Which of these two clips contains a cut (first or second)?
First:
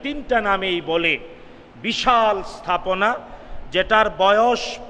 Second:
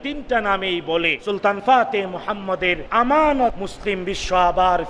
second